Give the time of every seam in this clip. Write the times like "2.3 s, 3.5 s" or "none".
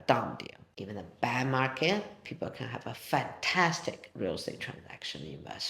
none